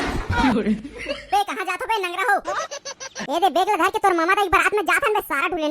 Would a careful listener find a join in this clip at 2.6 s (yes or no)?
no